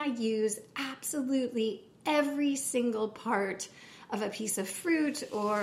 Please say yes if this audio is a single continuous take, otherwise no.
yes